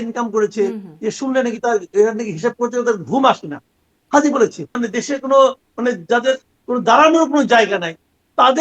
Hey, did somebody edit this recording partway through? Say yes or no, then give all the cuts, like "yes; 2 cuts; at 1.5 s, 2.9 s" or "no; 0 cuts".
yes; 1 cut; at 4.8 s